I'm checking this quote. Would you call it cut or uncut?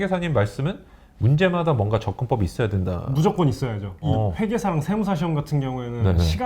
cut